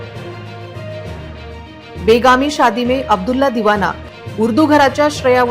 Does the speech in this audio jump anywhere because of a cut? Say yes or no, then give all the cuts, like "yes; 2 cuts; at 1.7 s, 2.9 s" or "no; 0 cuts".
yes; 1 cut; at 1.5 s